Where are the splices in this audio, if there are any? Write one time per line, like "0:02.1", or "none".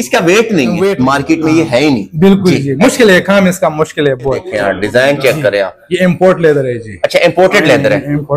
0:00.9
0:04.5